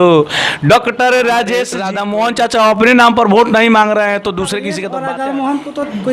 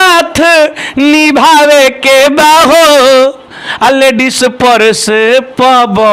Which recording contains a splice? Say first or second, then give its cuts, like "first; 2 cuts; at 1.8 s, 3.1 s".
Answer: first; 2 cuts; at 1.8 s, 4.8 s